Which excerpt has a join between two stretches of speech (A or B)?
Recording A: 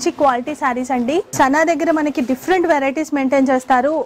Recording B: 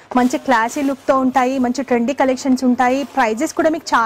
A